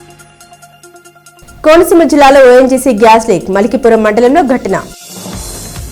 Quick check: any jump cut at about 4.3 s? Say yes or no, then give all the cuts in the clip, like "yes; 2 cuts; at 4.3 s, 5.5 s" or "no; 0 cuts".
no; 1 cut; at 1.0 s